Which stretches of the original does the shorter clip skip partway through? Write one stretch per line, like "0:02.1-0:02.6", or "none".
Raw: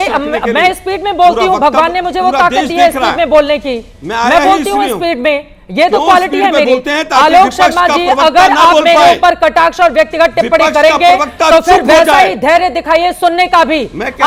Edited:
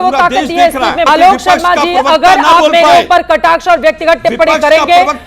0:03.3-0:07.2

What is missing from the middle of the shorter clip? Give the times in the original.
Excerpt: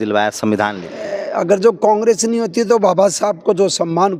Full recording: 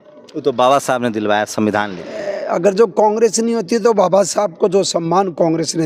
none

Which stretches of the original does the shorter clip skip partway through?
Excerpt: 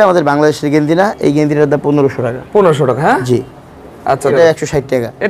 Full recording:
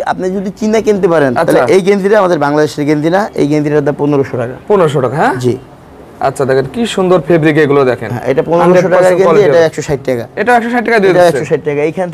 0:06.5-0:09.5

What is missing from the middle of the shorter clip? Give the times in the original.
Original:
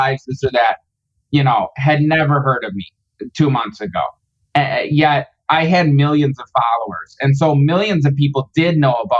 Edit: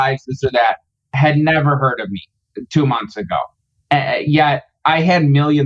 0:01.1-0:01.7

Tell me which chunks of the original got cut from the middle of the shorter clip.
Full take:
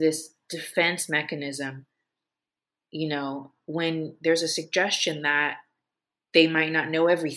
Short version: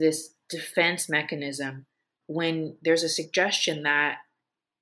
0:02.1-0:03.5

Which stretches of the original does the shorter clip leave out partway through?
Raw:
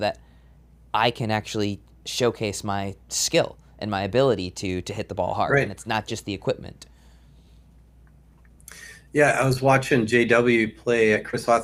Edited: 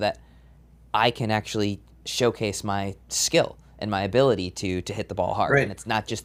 none

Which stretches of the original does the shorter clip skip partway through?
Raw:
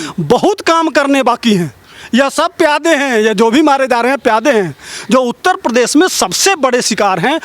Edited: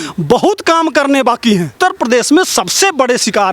0:01.7-0:05.4

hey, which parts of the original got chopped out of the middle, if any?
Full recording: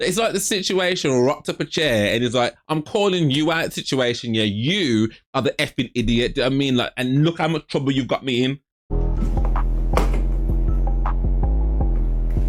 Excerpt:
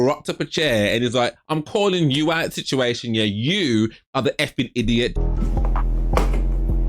0:06.3-0:08.9

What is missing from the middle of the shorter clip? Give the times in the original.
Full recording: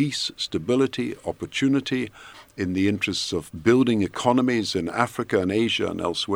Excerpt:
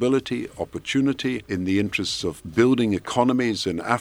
0:02.1-0:02.5

